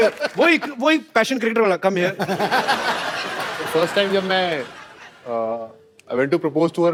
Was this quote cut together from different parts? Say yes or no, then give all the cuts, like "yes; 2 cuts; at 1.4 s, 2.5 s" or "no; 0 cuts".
no; 0 cuts